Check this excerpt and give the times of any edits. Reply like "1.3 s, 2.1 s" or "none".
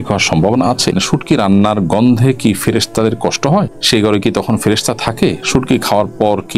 0.9 s, 3.8 s